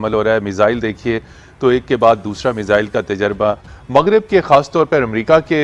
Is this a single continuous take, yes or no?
yes